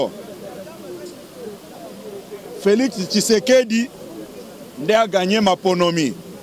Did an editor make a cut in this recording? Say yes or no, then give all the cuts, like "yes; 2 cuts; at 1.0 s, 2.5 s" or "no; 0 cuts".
no; 0 cuts